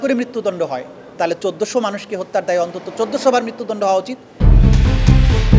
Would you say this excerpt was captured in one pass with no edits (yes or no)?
no